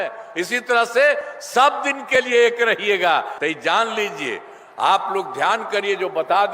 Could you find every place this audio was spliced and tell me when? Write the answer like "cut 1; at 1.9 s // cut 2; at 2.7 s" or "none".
cut 1; at 3.4 s